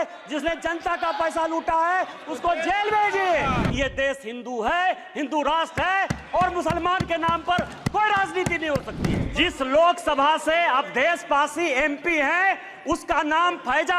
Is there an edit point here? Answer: yes; 2 cuts; at 3.7 s, 9.2 s

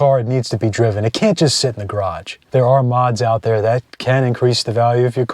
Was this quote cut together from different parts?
yes; 2 cuts; at 2.4 s, 3.9 s

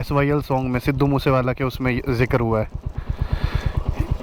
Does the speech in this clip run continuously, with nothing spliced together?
yes; 0 cuts

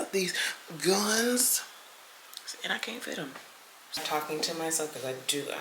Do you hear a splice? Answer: yes; 1 cut; at 4.0 s

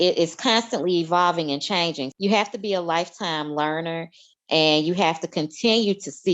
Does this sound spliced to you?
yes; 1 cut; at 2.1 s

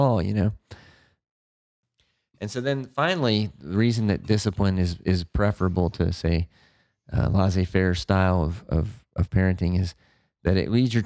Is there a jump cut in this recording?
yes; 1 cut; at 1.6 s

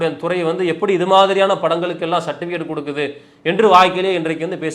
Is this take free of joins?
yes; 0 cuts

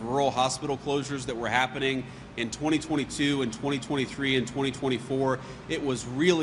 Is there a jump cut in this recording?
no; 0 cuts

